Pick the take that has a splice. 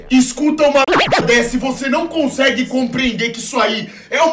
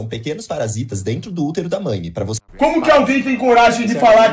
second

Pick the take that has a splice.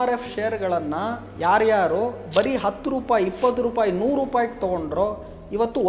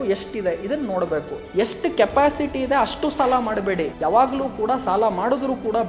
second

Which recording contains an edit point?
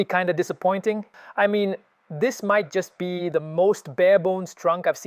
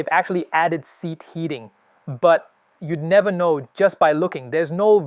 first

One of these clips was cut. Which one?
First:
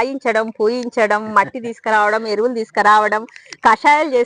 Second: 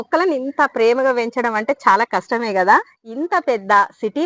second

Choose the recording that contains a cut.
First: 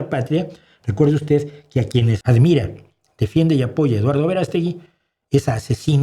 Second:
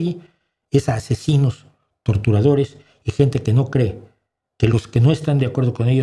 first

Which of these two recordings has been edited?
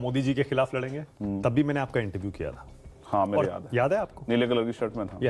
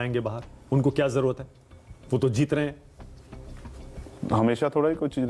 first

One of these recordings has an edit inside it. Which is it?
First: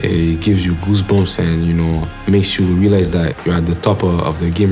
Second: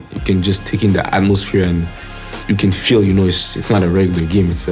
first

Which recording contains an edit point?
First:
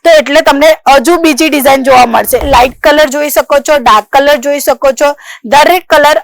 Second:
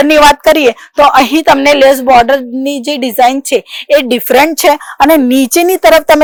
first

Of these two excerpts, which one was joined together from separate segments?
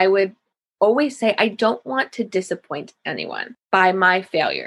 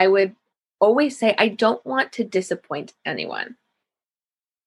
first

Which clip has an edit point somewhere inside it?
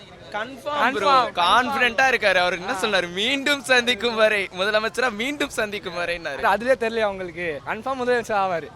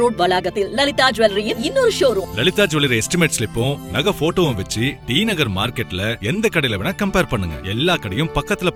first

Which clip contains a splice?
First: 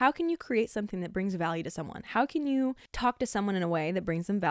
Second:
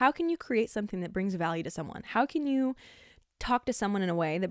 first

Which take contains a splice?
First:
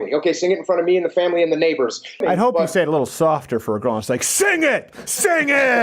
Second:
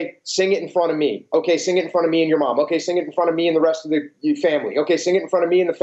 first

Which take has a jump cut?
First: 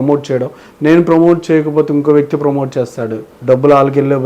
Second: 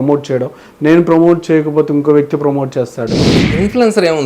second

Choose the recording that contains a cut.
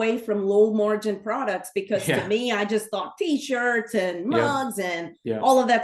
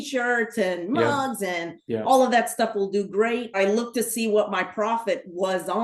second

